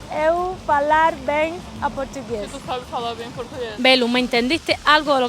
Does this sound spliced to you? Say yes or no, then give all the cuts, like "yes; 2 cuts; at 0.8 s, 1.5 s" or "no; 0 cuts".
yes; 1 cut; at 3.7 s